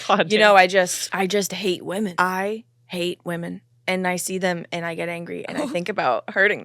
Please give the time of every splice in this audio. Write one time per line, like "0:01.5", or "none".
0:01.0
0:02.1